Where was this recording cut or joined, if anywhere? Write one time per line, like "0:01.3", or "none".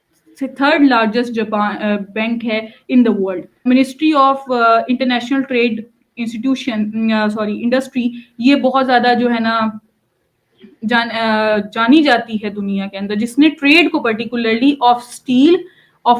0:03.6